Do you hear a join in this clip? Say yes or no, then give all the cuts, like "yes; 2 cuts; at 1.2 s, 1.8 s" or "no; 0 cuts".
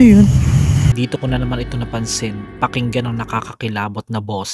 yes; 1 cut; at 0.9 s